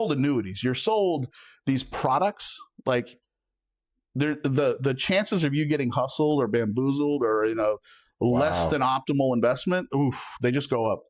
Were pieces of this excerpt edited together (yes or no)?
no